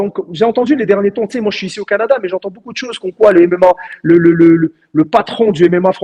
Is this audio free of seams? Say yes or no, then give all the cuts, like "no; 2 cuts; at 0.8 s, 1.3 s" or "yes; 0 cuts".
yes; 0 cuts